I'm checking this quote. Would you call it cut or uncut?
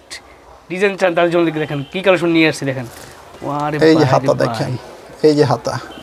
uncut